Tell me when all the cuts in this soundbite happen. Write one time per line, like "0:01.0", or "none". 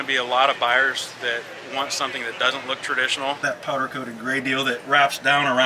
0:03.4